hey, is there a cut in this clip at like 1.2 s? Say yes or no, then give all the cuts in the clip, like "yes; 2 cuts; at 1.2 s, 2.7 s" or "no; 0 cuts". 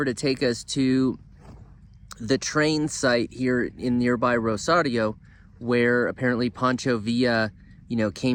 no; 0 cuts